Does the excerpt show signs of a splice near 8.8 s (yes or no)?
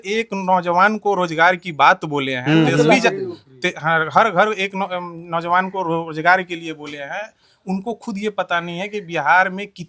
no